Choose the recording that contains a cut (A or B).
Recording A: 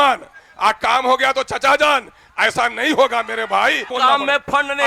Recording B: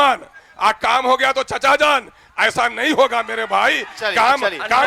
A